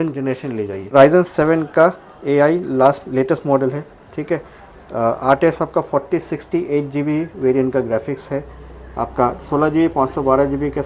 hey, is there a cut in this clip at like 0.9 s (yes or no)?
yes